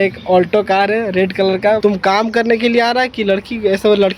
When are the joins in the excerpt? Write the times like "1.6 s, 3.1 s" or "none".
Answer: 1.8 s